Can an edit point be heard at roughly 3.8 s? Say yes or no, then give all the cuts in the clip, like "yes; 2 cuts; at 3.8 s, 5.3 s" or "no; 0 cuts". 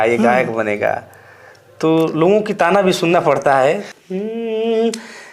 yes; 1 cut; at 3.8 s